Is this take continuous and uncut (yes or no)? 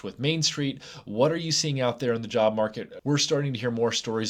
no